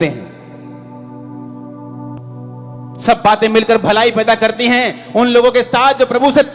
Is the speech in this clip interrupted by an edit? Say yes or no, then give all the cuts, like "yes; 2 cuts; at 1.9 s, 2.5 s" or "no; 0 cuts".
yes; 1 cut; at 2.2 s